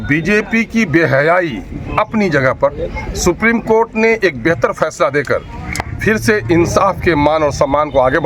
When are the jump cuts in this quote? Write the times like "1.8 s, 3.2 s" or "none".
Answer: none